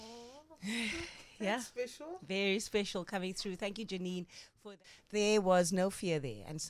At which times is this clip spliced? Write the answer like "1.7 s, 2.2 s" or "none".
4.7 s